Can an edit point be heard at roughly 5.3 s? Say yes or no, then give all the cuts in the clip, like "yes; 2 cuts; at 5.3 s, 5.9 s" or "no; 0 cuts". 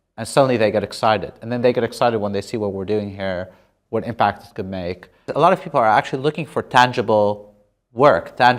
yes; 1 cut; at 5.3 s